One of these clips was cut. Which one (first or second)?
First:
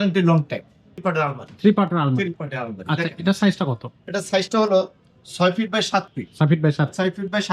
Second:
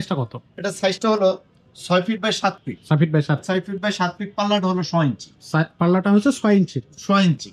first